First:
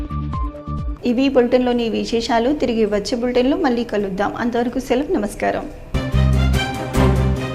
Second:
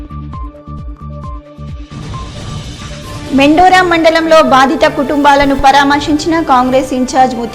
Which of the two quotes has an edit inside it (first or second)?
second